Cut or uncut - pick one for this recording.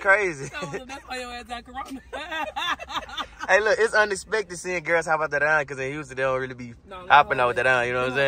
uncut